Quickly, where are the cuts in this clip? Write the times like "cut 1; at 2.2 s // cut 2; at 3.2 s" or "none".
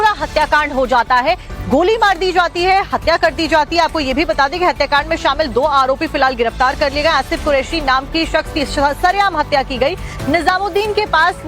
cut 1; at 1.5 s